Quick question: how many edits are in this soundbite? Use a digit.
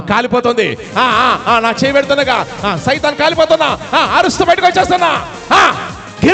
0